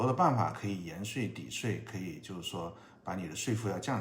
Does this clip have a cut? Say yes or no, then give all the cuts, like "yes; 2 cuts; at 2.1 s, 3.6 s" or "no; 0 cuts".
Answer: no; 0 cuts